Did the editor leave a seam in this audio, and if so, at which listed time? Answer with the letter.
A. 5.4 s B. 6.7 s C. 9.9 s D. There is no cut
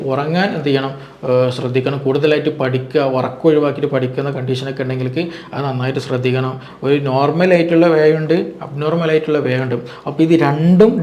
B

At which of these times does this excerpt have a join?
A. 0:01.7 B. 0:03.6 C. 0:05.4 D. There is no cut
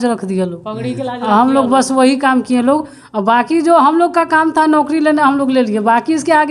D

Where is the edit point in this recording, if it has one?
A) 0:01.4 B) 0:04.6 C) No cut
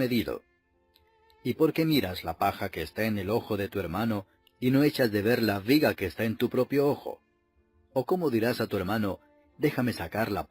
A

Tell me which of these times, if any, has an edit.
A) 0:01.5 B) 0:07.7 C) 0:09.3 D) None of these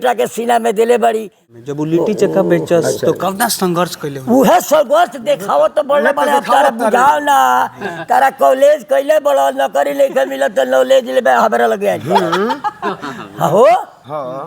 A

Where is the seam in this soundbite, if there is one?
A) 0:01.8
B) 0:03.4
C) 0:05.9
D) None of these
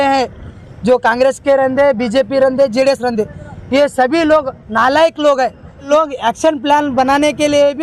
C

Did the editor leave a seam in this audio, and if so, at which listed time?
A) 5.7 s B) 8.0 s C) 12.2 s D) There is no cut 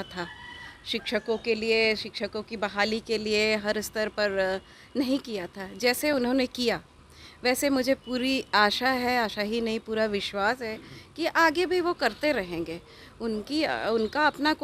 D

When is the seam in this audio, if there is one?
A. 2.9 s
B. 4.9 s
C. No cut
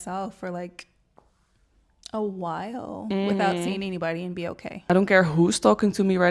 B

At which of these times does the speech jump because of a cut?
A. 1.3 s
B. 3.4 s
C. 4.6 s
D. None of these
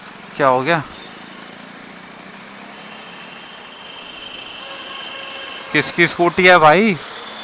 D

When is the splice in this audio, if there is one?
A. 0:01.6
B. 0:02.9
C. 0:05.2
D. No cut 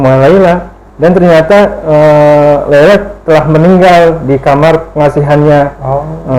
D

